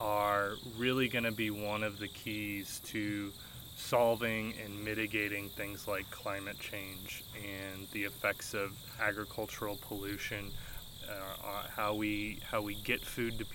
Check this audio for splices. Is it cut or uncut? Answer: uncut